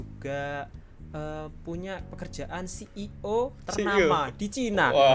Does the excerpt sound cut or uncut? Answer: uncut